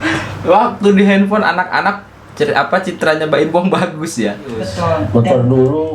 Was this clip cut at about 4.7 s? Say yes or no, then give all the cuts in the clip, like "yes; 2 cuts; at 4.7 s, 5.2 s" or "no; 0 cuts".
yes; 1 cut; at 4.7 s